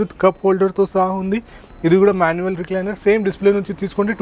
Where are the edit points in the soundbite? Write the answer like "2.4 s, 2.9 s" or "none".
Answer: none